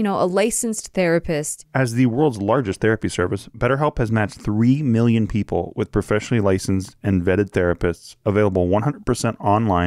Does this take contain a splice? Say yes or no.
yes